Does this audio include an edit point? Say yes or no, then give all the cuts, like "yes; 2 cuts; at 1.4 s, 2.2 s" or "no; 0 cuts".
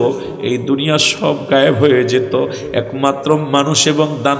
no; 0 cuts